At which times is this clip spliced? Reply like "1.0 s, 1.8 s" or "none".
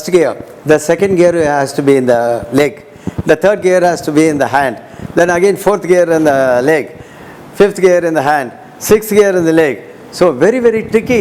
none

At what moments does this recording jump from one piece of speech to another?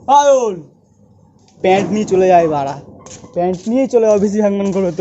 2.8 s

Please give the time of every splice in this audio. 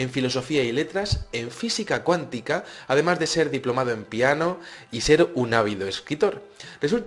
1.8 s

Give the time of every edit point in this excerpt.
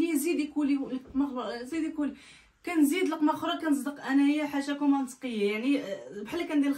none

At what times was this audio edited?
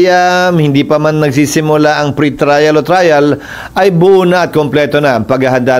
none

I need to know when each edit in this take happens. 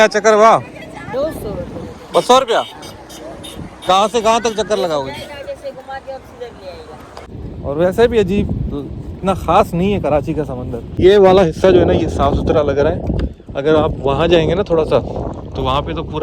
7.3 s, 11.0 s

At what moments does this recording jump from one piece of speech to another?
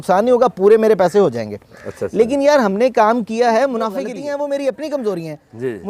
4.1 s

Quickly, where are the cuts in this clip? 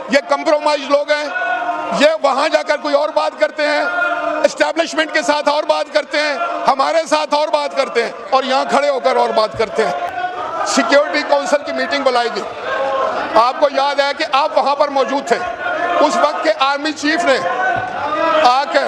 none

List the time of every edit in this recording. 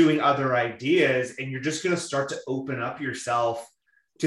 none

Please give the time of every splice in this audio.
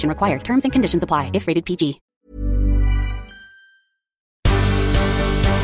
2.1 s, 4.3 s

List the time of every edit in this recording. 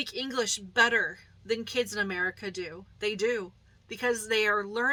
none

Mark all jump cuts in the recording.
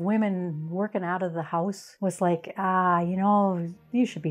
1.9 s

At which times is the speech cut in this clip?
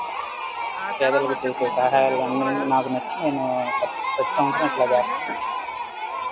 5.0 s

